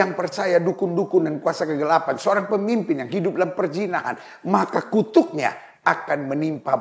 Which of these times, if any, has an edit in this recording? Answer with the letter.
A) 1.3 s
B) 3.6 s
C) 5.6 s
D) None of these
D